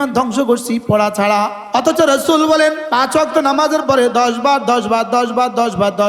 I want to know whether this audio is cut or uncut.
cut